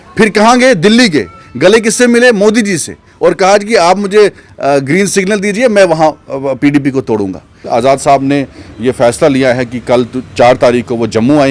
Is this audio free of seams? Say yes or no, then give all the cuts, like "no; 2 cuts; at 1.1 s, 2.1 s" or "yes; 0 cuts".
no; 1 cut; at 7.7 s